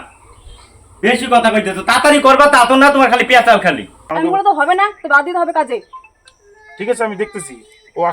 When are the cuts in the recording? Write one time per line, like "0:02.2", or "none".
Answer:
0:04.0